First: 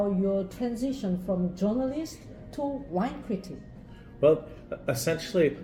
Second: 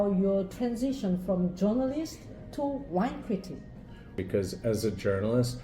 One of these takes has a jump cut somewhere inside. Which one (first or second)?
second